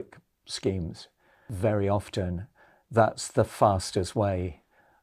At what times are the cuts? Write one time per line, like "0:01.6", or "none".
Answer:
0:01.4